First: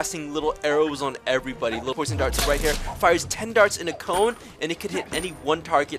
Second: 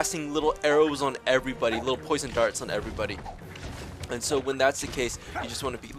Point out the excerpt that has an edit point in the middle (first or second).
first